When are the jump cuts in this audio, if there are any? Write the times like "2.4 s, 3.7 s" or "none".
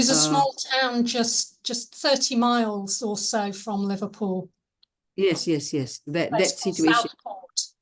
none